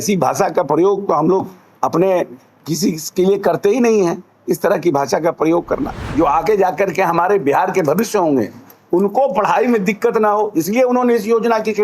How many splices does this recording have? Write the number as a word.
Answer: one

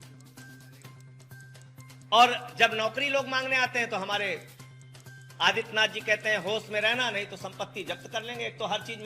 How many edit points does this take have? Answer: two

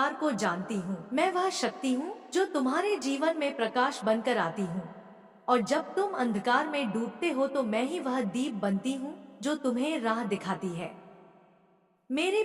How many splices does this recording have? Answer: one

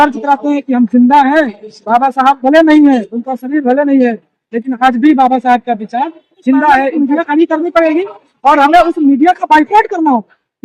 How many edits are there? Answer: one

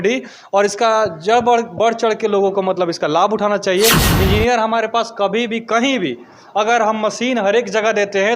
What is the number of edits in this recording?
one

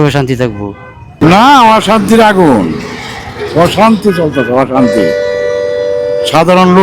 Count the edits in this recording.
one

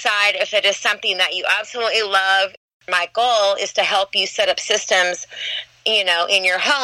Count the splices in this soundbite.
one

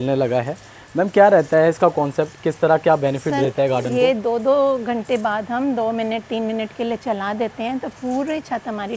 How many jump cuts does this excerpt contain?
zero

